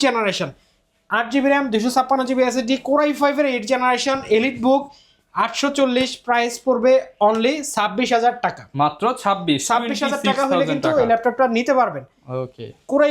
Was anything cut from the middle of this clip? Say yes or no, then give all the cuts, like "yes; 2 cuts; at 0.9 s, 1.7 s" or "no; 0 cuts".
no; 0 cuts